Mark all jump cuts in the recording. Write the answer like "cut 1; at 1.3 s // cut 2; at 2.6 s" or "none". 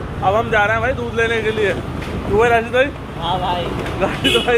none